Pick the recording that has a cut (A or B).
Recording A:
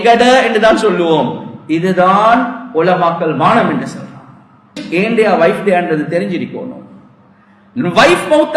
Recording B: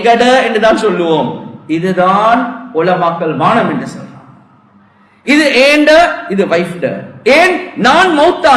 A